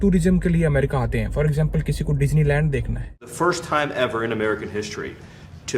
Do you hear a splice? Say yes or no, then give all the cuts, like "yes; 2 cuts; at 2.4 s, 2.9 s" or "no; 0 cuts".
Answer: yes; 1 cut; at 3.3 s